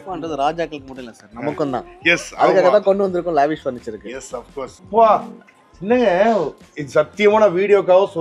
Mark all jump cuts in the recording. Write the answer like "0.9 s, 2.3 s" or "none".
4.8 s